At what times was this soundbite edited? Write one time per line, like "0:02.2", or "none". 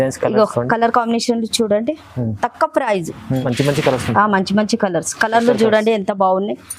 0:03.4